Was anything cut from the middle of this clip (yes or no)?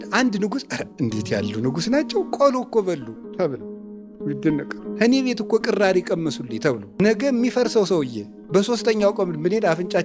no